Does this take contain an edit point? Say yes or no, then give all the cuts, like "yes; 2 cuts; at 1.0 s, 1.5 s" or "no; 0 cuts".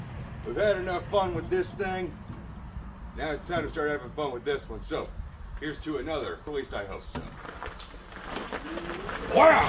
yes; 1 cut; at 6.5 s